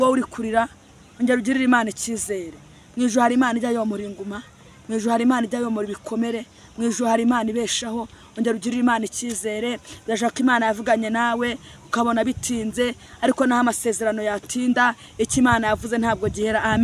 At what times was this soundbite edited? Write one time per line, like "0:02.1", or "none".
none